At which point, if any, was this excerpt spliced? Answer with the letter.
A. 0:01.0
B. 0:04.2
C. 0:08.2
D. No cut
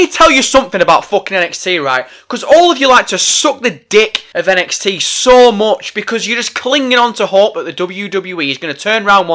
B